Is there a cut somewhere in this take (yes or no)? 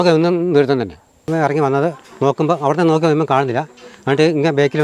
yes